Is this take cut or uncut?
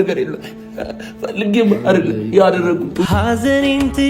cut